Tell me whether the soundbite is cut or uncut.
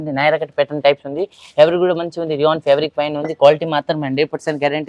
uncut